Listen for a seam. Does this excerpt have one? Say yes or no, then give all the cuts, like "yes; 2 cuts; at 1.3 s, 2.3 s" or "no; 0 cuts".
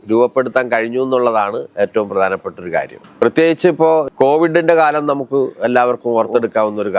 no; 0 cuts